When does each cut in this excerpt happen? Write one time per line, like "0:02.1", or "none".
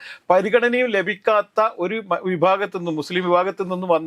none